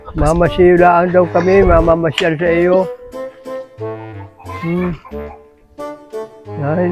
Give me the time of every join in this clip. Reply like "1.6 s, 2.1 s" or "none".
none